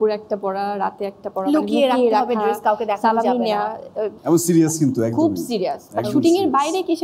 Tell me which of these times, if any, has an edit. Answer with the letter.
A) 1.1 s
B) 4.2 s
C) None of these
B